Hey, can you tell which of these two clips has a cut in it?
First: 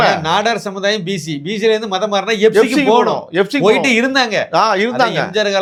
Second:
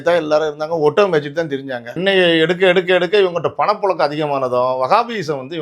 second; 1 cut; at 2.0 s

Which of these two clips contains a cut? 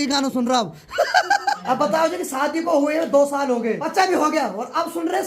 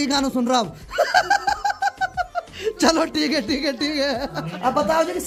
first; 2 cuts; at 1.6 s, 3.8 s

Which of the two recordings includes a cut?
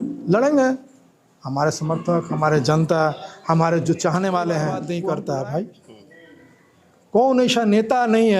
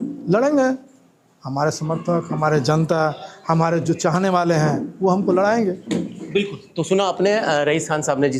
first; 1 cut; at 4.8 s

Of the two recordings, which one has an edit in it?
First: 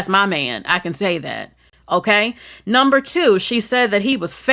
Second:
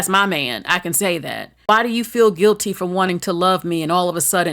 second; 1 cut; at 1.5 s

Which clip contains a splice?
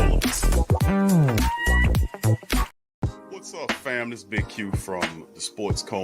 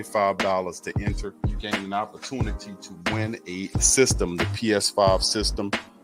first; 1 cut; at 2.7 s

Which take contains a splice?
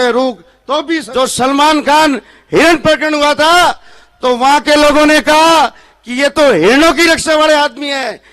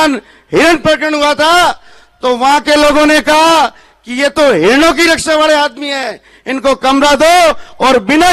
first; 1 cut; at 1.1 s

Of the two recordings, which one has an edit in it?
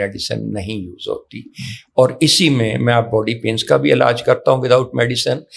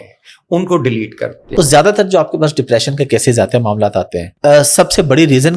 second; 2 cuts; at 1.4 s, 4.2 s

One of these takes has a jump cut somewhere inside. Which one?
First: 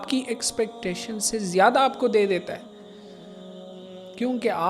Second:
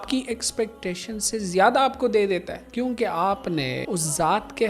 second; 2 cuts; at 2.6 s, 3.8 s

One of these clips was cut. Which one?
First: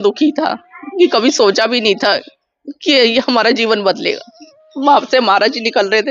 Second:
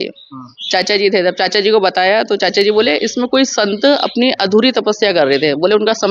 first; 1 cut; at 4.6 s

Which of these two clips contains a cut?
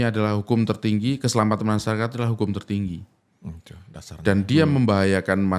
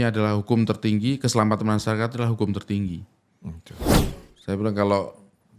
second; 1 cut; at 4.1 s

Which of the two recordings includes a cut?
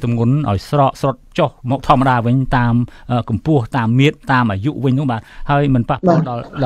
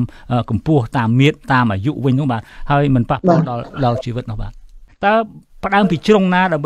second; 1 cut; at 4.8 s

